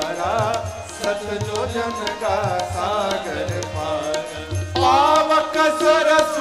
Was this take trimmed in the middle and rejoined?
no; 0 cuts

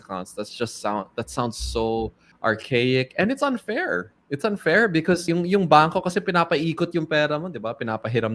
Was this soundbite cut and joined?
yes; 2 cuts; at 2.2 s, 5.2 s

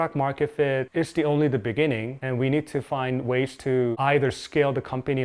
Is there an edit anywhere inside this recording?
no; 0 cuts

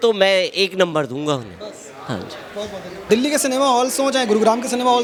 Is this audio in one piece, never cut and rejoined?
yes; 0 cuts

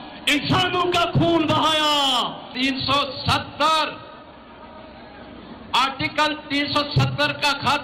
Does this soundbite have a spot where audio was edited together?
yes; 1 cut; at 2.4 s

